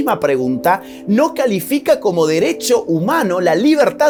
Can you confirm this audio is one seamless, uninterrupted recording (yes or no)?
yes